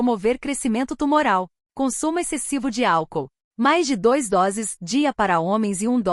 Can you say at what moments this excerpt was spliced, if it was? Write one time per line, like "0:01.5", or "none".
0:01.6